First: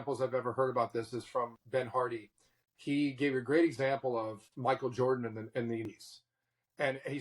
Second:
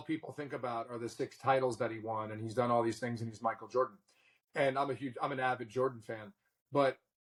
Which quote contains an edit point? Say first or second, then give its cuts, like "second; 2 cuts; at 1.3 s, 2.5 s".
first; 2 cuts; at 1.6 s, 5.9 s